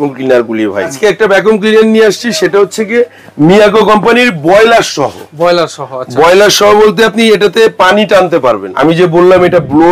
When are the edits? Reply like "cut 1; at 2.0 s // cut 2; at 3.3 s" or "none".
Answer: cut 1; at 0.9 s // cut 2; at 8.7 s

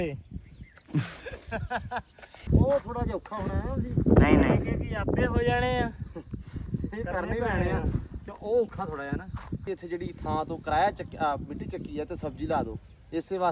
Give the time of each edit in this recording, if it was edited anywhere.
cut 1; at 2.4 s // cut 2; at 9.6 s

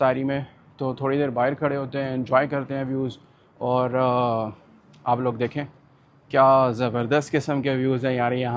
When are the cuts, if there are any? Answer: none

